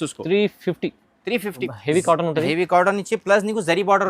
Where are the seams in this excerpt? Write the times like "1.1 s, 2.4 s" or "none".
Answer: 1.6 s